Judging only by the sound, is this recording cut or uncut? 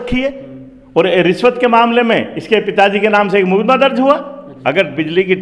cut